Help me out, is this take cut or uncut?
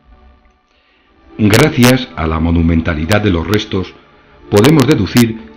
cut